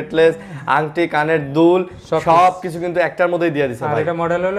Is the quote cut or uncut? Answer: uncut